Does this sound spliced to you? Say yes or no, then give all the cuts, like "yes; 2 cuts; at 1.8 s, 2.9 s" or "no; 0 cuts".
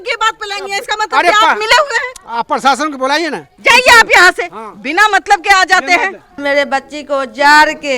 yes; 2 cuts; at 3.5 s, 6.4 s